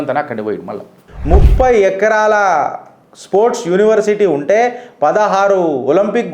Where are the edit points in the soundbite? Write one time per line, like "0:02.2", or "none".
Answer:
0:01.0